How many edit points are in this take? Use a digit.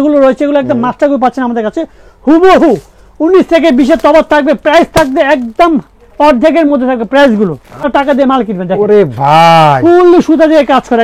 1